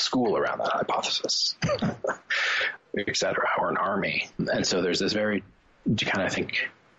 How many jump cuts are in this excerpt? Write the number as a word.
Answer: two